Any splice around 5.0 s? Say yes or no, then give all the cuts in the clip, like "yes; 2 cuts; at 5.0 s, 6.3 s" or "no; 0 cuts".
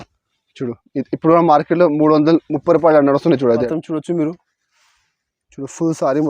no; 1 cut; at 3.6 s